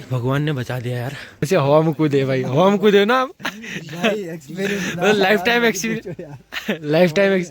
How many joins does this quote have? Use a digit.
1